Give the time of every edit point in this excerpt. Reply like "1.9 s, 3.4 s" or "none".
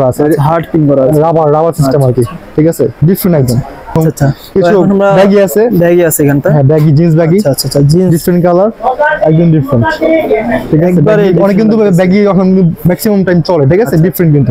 3.9 s